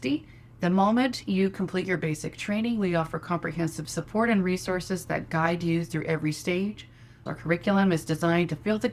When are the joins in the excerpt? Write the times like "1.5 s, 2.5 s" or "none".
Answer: 7.2 s

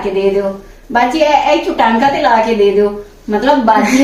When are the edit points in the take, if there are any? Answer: none

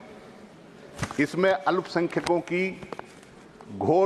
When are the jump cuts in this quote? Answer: none

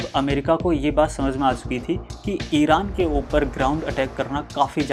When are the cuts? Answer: none

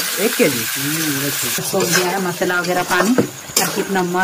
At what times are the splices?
1.6 s

